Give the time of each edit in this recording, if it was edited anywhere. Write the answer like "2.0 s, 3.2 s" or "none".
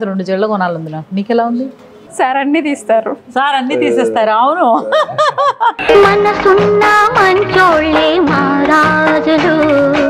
none

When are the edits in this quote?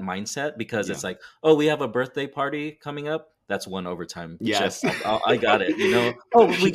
4.4 s

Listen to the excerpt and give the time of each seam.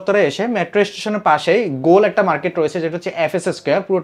none

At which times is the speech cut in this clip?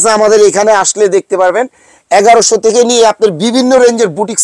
none

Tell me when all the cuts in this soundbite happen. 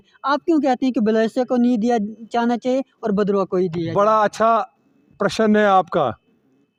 none

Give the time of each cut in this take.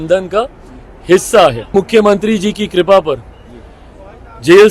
1.7 s

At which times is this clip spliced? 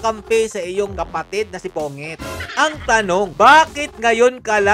2.4 s

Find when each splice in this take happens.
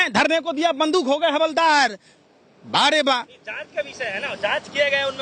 none

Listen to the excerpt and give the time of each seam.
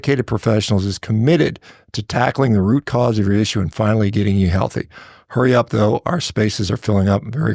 none

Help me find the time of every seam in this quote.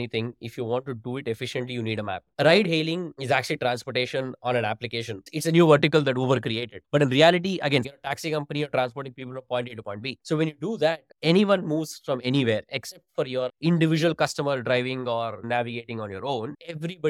2.3 s, 3.1 s, 7.9 s, 15.4 s

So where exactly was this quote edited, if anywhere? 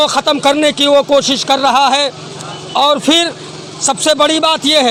none

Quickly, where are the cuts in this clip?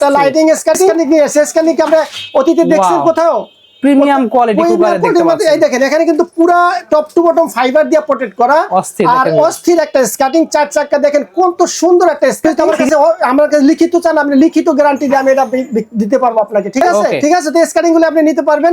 1.0 s, 12.4 s, 17.2 s

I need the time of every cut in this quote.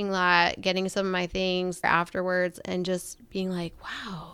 1.8 s

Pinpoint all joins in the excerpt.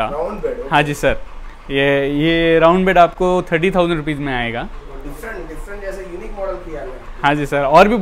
none

